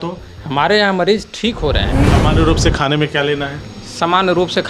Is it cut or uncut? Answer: cut